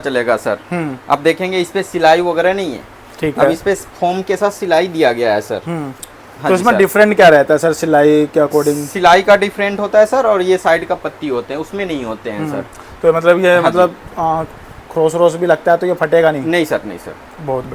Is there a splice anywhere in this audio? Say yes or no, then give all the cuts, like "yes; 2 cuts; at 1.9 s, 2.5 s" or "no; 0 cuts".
no; 0 cuts